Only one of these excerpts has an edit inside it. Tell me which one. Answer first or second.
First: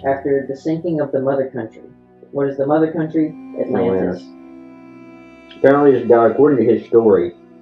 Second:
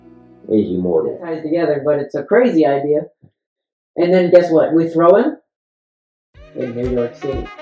second